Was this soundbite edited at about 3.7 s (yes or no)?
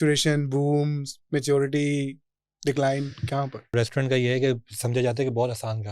yes